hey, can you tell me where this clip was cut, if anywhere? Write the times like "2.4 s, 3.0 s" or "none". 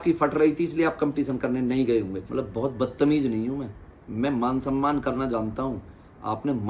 2.2 s

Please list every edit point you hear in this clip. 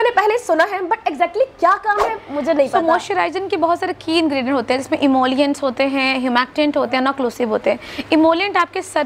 none

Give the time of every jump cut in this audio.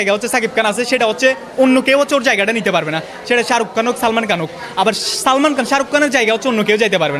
none

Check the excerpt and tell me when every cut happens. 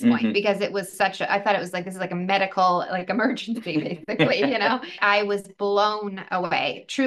5.0 s

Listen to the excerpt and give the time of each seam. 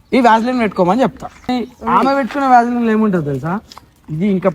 1.5 s

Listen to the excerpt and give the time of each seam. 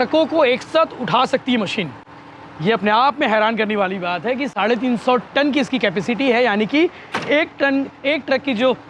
none

